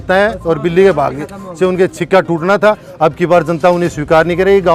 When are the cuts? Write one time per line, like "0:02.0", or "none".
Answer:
none